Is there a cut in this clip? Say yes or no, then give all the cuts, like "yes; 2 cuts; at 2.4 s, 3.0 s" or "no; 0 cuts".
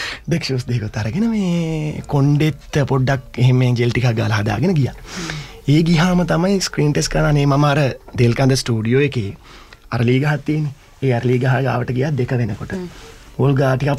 no; 0 cuts